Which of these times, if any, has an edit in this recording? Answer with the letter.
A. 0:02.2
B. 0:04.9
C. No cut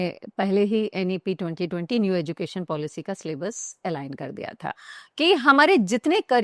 B